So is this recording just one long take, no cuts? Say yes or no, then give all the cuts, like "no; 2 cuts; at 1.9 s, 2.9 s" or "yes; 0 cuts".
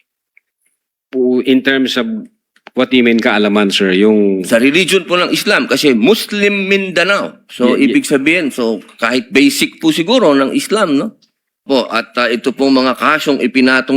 no; 1 cut; at 11.6 s